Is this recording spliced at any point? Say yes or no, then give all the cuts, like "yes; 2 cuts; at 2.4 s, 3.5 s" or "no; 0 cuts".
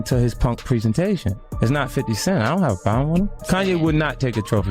yes; 2 cuts; at 1.4 s, 3.4 s